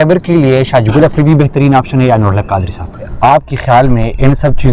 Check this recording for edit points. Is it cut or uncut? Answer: cut